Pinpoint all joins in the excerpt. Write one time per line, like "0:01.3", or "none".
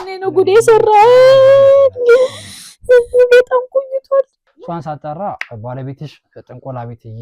0:04.4

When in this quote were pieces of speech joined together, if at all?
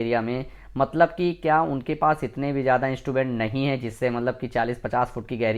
none

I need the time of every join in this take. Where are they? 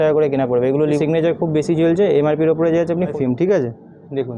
0:01.0
0:03.1

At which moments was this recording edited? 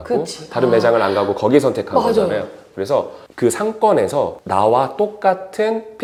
none

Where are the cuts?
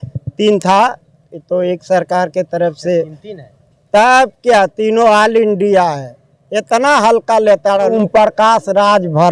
0:07.9

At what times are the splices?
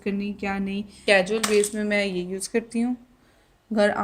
0:01.0

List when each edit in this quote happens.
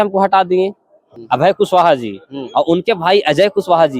0:01.1

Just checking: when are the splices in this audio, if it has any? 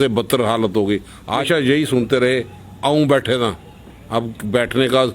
0:01.4

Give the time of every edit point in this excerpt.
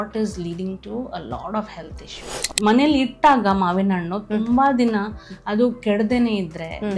0:02.5

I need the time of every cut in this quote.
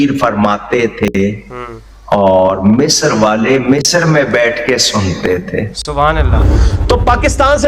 0:06.4

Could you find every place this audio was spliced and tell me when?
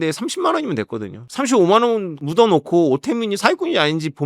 0:01.3

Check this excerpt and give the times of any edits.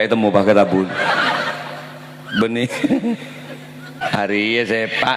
0:04.0

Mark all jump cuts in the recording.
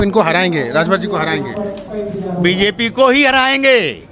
0:01.8

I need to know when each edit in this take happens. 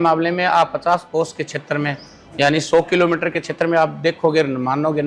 0:01.1

